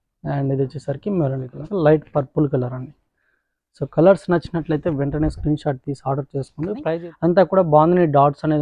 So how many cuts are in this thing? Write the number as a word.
two